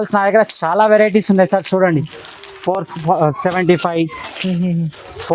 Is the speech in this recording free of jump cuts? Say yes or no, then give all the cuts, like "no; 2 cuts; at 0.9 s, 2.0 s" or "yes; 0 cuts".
yes; 0 cuts